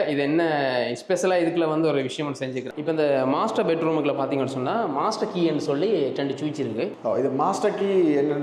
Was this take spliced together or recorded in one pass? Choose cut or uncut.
cut